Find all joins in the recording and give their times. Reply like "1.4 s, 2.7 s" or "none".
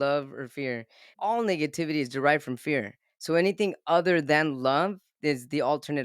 1.1 s, 5.1 s